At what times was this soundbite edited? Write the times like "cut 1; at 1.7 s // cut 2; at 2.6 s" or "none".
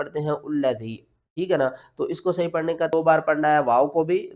cut 1; at 2.9 s